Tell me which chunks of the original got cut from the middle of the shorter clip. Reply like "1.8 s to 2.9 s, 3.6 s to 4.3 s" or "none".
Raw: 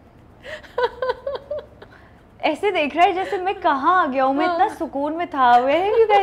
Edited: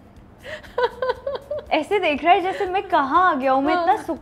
1.6 s to 2.4 s